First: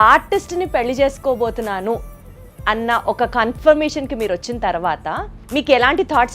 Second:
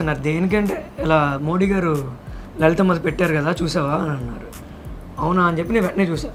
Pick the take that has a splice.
first; 1 cut; at 5.3 s

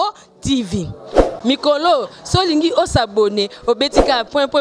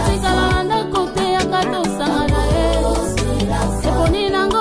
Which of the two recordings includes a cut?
first; 1 cut; at 1.4 s

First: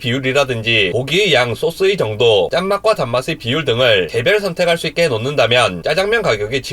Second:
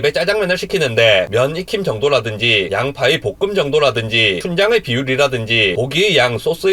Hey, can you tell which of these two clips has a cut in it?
first; 1 cut; at 5.8 s

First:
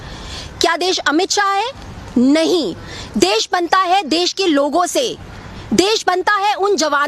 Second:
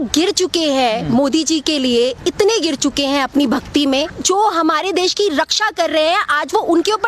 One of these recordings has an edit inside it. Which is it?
second; 1 cut; at 4.1 s

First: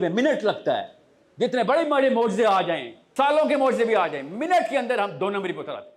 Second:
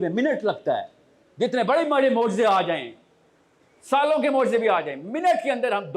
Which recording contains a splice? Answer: first; 1 cut; at 3.0 s

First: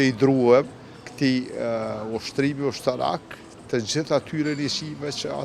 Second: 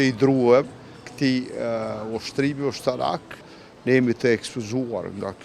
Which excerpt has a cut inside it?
second; 1 cut; at 3.5 s

